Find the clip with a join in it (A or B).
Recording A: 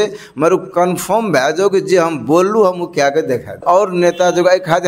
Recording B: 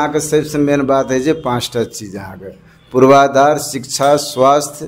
A